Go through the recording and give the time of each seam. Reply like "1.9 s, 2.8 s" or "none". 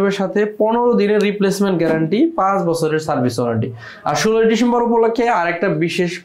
none